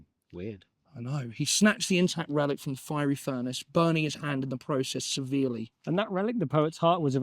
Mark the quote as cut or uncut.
cut